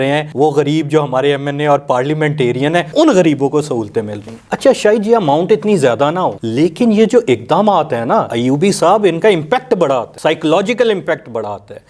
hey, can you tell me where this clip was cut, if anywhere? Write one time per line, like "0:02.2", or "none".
none